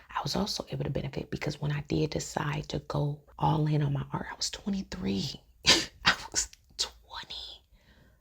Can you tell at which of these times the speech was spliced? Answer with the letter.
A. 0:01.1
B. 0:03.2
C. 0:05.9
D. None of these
B